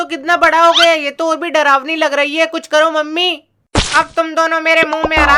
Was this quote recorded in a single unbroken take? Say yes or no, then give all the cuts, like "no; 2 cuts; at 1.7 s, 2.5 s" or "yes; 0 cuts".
yes; 0 cuts